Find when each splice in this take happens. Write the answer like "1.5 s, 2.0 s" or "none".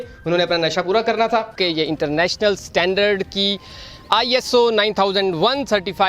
1.6 s